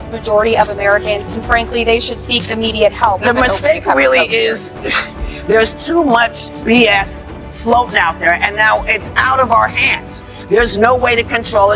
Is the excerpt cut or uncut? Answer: cut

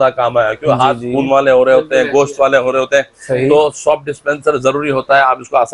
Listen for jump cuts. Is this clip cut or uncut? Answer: uncut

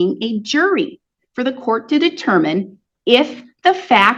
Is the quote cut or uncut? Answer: uncut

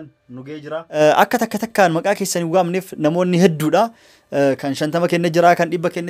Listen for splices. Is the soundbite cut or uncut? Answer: cut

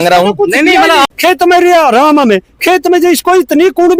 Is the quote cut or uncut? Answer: cut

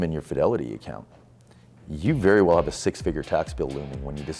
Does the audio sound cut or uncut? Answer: uncut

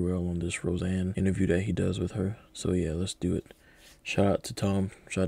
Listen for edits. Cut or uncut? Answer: cut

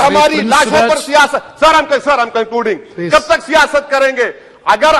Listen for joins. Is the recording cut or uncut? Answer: uncut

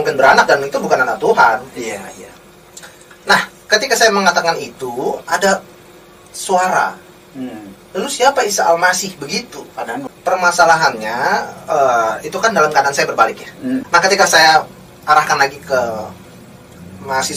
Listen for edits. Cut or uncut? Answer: cut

